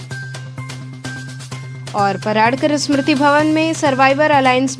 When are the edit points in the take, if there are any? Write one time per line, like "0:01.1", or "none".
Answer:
none